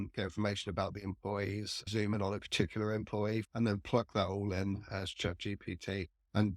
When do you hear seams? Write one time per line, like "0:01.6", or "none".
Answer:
0:01.9
0:03.4